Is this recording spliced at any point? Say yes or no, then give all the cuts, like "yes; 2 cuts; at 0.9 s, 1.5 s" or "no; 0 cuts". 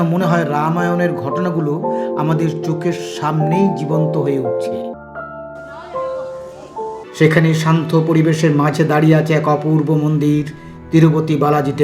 yes; 2 cuts; at 4.9 s, 7.0 s